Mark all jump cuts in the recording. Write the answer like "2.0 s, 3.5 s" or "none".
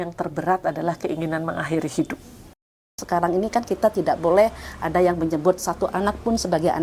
2.8 s